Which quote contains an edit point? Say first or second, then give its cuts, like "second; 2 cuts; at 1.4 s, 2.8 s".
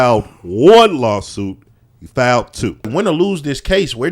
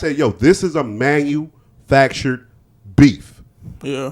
first; 1 cut; at 2.9 s